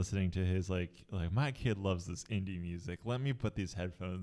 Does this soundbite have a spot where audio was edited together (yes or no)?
no